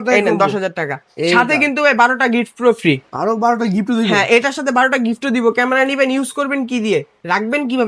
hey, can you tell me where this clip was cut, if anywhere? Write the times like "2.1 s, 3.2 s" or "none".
none